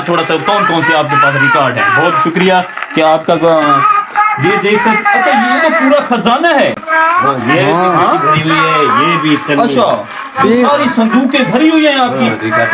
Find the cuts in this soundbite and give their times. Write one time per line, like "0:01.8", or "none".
none